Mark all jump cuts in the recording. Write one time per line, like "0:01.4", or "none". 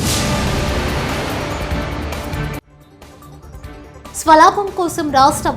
0:03.3